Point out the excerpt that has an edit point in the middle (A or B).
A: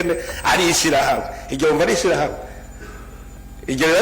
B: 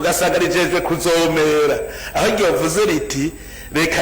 A